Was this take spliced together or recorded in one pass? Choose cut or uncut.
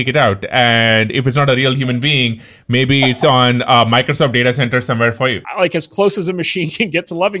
cut